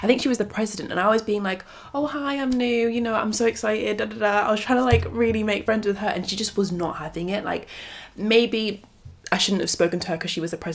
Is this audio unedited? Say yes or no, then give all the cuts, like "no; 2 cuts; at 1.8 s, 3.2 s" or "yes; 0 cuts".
yes; 0 cuts